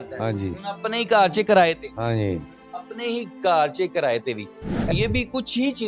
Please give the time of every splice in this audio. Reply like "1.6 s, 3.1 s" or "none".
4.9 s